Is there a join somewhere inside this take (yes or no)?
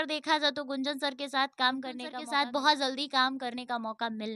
yes